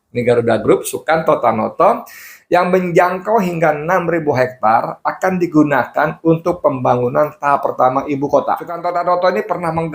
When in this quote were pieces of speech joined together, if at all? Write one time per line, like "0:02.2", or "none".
0:08.8